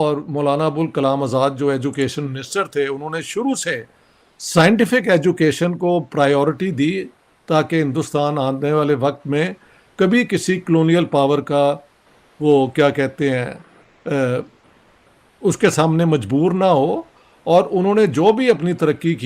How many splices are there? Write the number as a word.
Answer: zero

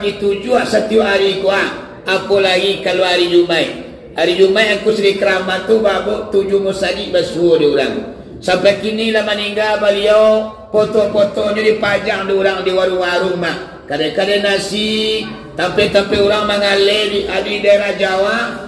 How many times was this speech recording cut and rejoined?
zero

